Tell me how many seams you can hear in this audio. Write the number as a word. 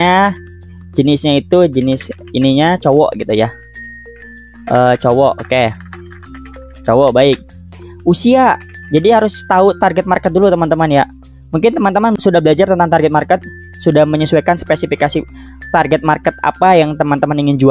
one